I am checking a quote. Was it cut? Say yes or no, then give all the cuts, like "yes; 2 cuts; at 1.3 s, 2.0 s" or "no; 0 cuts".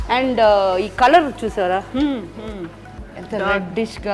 no; 0 cuts